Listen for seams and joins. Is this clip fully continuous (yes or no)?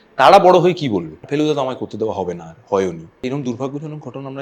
no